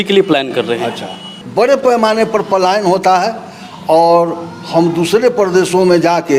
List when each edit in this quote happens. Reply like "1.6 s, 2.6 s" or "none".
1.3 s